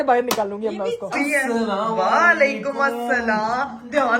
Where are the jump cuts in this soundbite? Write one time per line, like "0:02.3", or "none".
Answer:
0:01.1